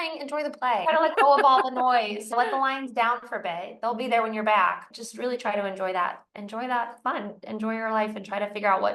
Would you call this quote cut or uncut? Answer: cut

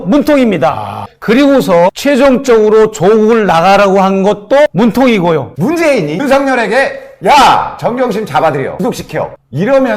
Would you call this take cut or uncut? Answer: cut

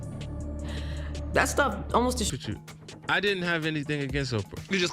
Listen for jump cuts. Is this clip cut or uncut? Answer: cut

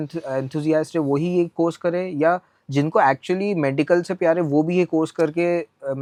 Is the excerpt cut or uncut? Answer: uncut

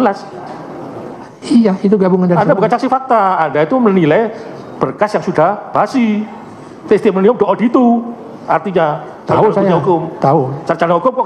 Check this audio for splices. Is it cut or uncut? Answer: uncut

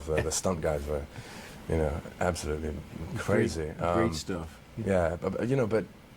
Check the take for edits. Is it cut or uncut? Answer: cut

